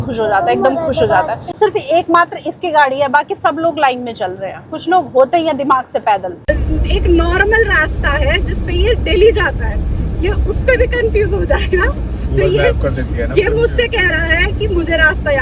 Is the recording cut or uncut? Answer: cut